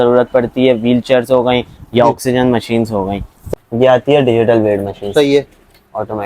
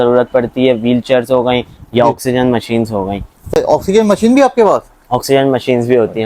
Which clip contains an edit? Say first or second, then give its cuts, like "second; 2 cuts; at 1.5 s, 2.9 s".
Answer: first; 1 cut; at 3.3 s